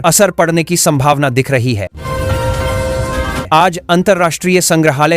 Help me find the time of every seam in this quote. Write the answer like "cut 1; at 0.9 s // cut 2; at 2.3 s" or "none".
cut 1; at 1.9 s // cut 2; at 3.4 s